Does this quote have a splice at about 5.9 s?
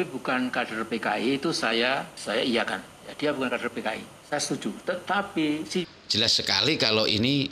yes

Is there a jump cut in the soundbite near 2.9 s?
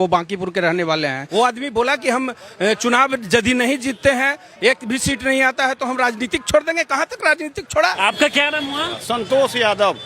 no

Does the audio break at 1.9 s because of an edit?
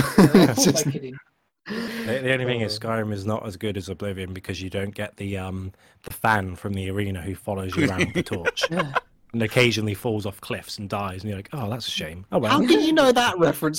yes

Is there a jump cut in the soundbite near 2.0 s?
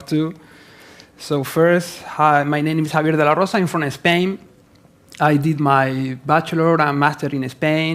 yes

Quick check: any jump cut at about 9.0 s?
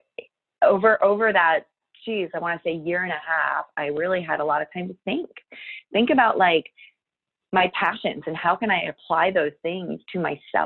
no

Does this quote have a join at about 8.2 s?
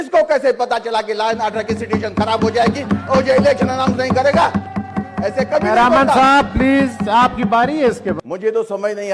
yes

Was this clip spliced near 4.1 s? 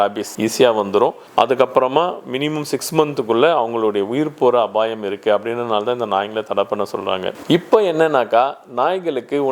no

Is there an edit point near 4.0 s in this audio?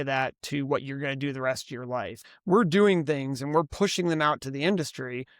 no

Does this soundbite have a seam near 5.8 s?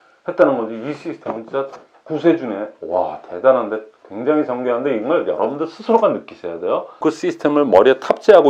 no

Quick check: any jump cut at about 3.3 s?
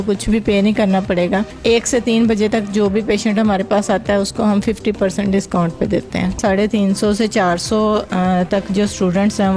no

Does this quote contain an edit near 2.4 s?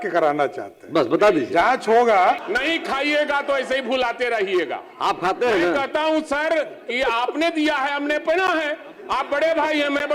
yes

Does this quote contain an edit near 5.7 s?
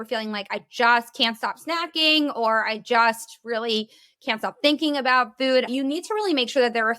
yes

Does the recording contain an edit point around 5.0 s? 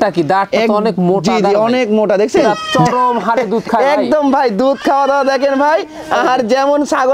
no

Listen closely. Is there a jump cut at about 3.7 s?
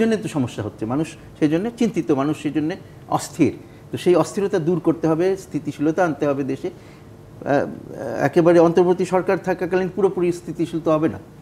yes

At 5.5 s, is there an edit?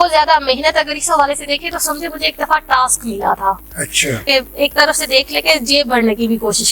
no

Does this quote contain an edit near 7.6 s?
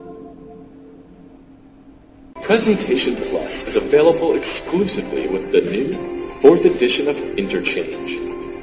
no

